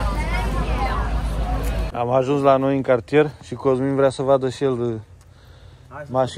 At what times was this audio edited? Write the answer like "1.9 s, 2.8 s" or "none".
1.8 s